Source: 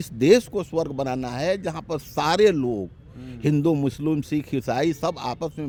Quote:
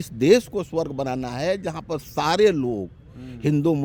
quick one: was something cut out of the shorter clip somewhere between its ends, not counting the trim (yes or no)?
no